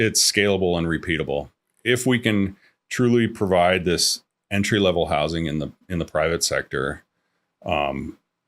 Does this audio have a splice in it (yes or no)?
yes